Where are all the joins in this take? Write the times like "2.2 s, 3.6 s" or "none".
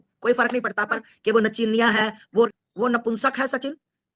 0.9 s, 2.5 s